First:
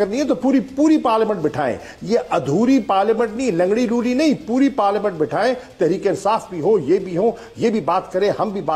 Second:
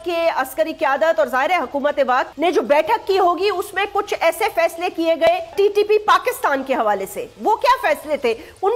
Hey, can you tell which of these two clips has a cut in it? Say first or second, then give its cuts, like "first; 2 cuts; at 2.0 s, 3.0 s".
second; 2 cuts; at 2.3 s, 5.5 s